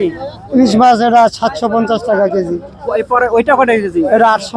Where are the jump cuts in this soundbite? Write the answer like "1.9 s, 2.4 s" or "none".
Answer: none